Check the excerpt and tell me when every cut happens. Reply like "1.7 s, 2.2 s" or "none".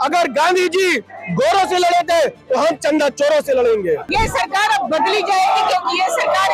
4.1 s